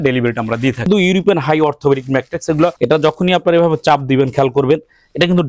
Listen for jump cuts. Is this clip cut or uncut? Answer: cut